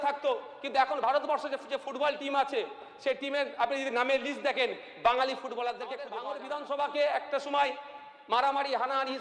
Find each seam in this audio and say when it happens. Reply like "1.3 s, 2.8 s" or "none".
6.2 s

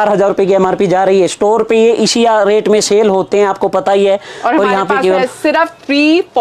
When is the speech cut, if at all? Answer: none

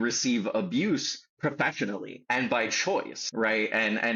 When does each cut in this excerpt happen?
2.1 s, 3.2 s

